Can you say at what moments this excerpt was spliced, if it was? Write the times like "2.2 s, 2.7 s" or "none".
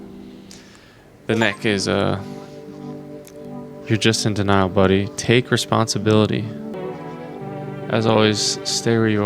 7.1 s

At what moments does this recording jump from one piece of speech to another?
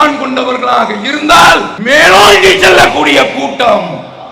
1.7 s

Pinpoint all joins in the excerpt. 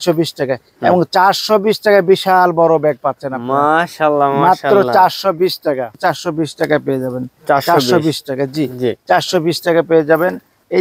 5.9 s

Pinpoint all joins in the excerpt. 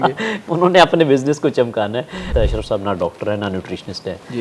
2.3 s

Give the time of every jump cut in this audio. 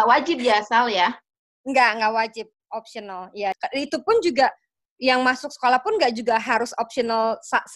3.6 s

